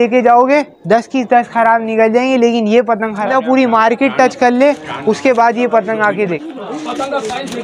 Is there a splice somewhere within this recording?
yes; 2 cuts; at 3.2 s, 6.3 s

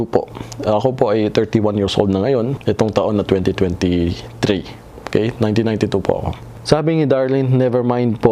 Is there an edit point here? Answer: no; 0 cuts

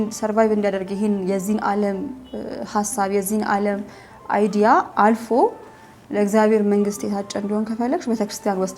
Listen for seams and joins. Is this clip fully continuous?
yes; 0 cuts

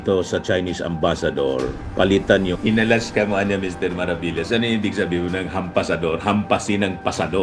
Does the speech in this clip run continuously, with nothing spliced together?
no; 1 cut; at 2.5 s

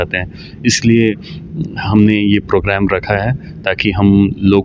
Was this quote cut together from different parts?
no; 0 cuts

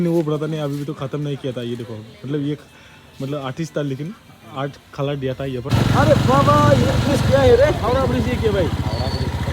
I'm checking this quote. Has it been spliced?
yes; 1 cut; at 5.7 s

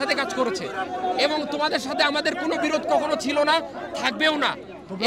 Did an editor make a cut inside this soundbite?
no; 0 cuts

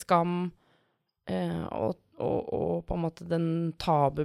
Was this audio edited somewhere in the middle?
no; 0 cuts

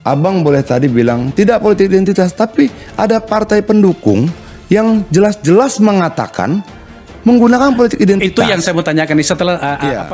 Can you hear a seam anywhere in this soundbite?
no; 0 cuts

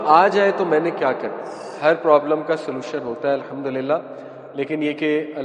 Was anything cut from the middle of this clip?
yes; 1 cut; at 1.7 s

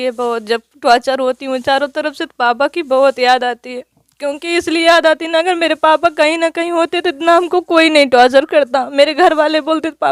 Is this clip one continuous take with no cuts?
yes; 0 cuts

